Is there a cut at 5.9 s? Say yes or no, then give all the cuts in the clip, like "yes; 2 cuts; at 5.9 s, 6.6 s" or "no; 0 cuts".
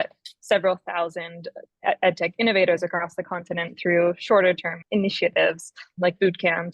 yes; 2 cuts; at 4.8 s, 5.9 s